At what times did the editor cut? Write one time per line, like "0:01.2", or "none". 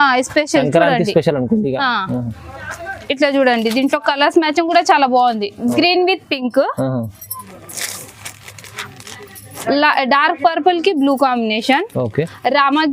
none